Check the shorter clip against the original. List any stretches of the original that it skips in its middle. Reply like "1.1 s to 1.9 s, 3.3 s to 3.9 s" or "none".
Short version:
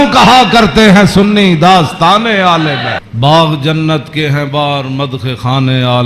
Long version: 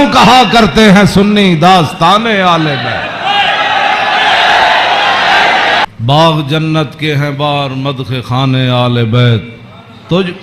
3.1 s to 6.0 s